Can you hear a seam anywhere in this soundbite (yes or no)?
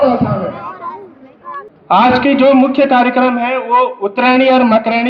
yes